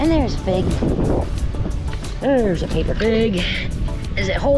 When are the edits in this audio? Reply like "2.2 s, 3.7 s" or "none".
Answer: none